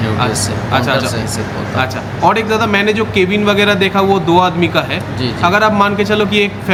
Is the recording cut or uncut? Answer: uncut